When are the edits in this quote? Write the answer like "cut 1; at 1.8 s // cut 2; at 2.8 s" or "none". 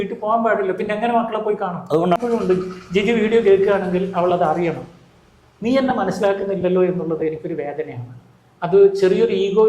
cut 1; at 2.2 s